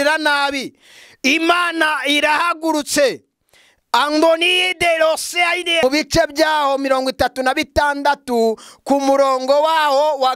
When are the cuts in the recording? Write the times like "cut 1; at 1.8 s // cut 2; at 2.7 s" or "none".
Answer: cut 1; at 5.8 s